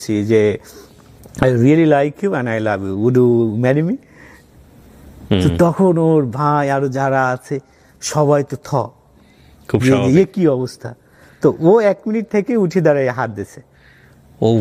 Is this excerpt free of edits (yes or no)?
yes